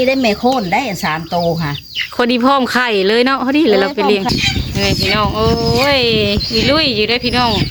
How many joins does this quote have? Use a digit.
1